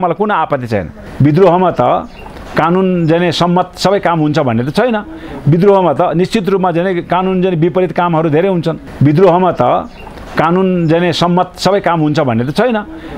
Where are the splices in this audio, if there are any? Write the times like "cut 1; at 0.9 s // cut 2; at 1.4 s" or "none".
cut 1; at 1.0 s // cut 2; at 8.8 s